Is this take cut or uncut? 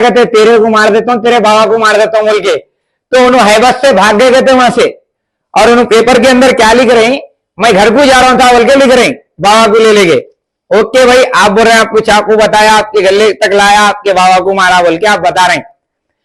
uncut